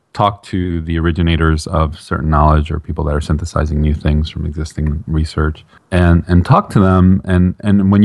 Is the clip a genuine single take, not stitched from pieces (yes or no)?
yes